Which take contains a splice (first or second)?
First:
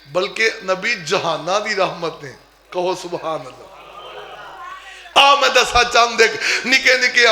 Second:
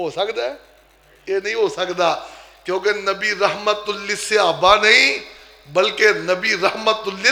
first